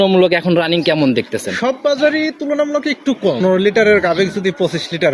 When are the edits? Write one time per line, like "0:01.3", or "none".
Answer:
0:03.4